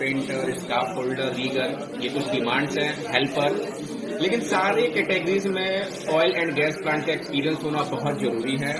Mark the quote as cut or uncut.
uncut